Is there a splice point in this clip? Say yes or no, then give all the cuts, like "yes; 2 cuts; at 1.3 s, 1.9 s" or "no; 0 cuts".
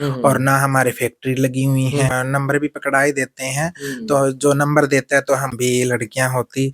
yes; 2 cuts; at 2.1 s, 5.5 s